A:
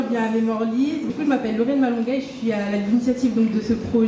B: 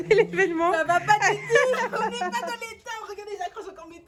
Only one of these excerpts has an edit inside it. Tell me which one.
A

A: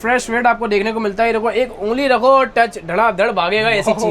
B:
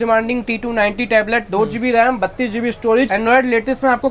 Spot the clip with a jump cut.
B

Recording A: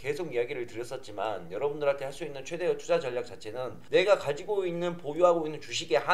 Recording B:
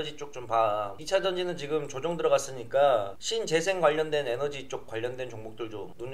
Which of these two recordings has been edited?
A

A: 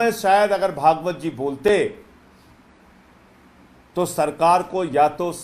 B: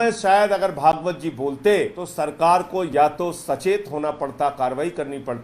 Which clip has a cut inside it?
B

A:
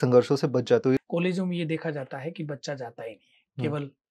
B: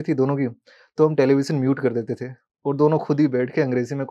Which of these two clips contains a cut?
A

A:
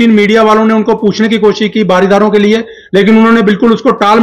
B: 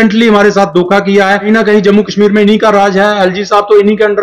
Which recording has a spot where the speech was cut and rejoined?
B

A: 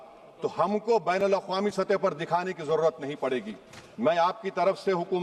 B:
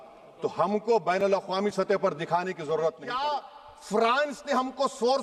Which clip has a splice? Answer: B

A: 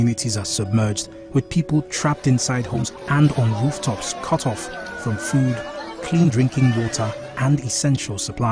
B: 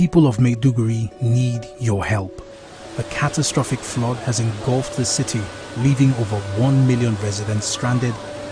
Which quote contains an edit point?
A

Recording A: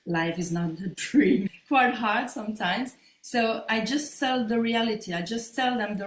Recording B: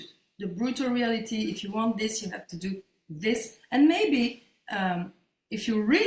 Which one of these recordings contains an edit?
A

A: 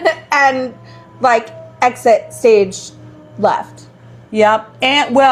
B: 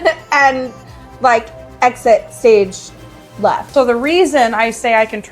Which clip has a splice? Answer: B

